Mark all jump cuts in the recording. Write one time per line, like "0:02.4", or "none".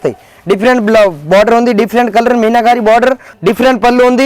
0:03.3